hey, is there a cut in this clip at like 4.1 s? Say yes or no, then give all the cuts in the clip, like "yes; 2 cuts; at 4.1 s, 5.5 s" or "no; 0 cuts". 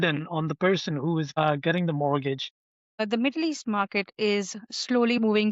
no; 2 cuts; at 1.3 s, 2.8 s